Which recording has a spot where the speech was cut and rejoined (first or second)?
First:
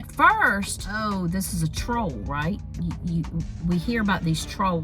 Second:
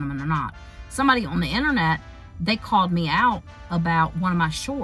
first